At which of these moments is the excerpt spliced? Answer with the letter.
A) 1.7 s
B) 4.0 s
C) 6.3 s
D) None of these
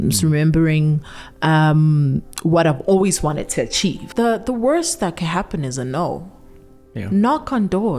B